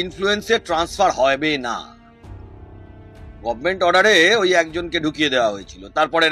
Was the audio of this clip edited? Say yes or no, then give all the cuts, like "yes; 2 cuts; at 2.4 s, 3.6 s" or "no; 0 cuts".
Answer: no; 0 cuts